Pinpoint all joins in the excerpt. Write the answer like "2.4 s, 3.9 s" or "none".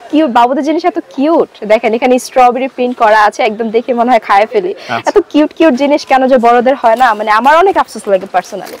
none